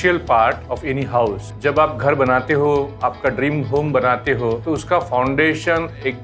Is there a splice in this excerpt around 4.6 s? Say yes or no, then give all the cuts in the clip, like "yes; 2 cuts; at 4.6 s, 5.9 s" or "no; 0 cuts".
yes; 2 cuts; at 1.2 s, 4.6 s